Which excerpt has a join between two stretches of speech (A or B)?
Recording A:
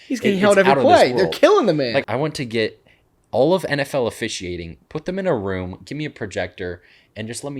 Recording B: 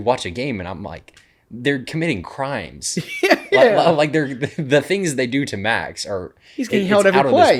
A